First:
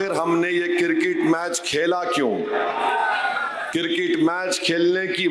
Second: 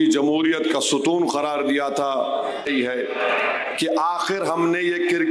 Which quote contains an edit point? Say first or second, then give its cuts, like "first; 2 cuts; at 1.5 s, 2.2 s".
second; 1 cut; at 2.6 s